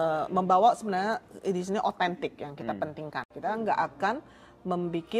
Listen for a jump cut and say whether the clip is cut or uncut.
cut